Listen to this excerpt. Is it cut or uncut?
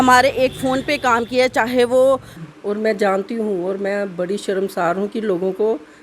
cut